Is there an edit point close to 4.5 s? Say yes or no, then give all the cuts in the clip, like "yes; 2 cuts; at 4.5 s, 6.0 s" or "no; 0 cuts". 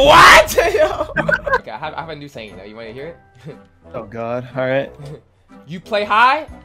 no; 1 cut; at 1.6 s